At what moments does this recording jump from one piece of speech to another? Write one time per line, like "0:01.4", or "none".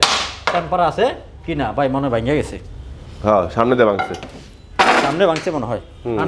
none